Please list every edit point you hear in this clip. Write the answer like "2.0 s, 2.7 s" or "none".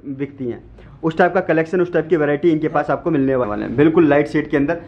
3.5 s